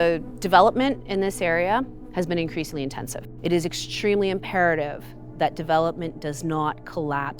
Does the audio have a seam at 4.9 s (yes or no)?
no